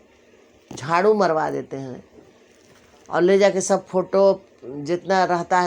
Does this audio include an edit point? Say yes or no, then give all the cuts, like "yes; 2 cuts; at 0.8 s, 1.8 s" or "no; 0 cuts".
no; 0 cuts